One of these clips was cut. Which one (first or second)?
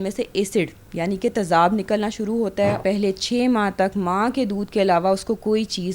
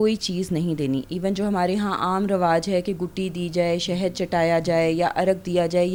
first